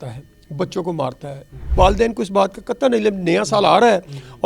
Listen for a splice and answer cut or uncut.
cut